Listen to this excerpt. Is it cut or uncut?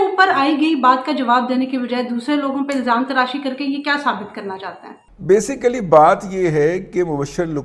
uncut